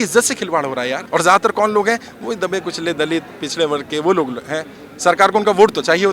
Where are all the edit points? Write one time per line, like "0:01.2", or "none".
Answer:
0:01.0